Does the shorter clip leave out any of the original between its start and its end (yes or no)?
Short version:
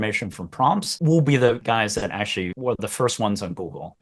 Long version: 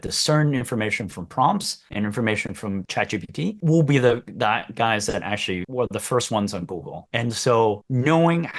yes